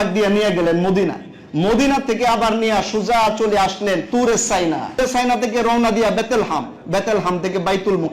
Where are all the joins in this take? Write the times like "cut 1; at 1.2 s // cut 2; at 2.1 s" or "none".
cut 1; at 4.0 s // cut 2; at 5.0 s